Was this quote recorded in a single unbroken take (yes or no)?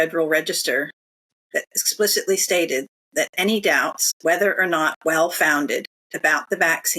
no